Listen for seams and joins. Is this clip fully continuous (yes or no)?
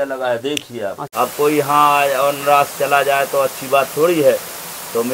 no